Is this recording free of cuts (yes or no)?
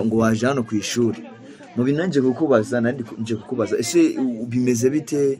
yes